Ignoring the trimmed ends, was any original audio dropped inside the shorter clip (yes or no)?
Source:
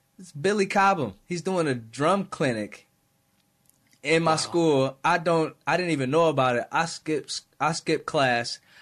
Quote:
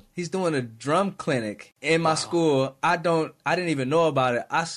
yes